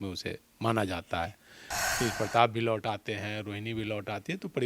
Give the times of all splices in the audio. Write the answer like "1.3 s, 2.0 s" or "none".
1.7 s